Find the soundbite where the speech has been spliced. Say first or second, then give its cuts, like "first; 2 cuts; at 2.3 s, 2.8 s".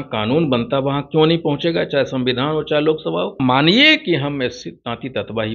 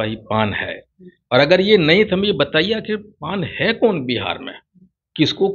first; 1 cut; at 3.4 s